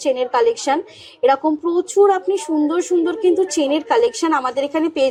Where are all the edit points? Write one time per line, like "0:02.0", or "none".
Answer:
none